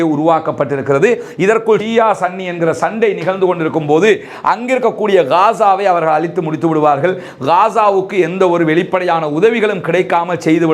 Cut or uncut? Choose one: cut